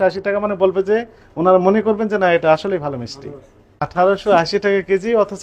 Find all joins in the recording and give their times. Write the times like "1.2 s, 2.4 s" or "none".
3.8 s